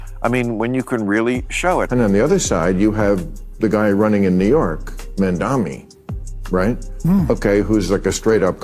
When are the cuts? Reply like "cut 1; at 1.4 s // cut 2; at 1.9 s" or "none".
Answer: cut 1; at 1.6 s